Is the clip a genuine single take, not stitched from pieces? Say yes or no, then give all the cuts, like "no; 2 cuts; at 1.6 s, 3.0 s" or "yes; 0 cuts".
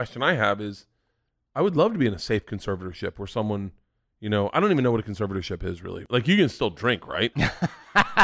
no; 2 cuts; at 5.9 s, 7.3 s